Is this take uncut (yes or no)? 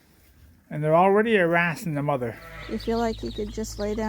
no